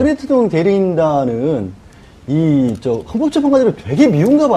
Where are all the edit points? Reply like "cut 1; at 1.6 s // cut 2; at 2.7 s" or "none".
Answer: cut 1; at 3.3 s